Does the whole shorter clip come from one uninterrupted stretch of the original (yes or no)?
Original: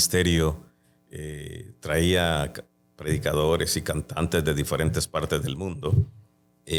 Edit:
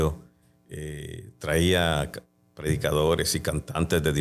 yes